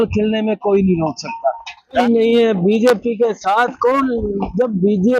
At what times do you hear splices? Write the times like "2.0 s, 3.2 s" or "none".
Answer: 2.0 s